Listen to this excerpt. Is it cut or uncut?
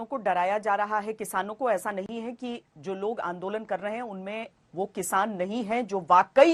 uncut